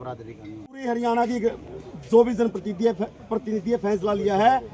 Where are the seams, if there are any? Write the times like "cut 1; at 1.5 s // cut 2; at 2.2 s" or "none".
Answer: cut 1; at 1.0 s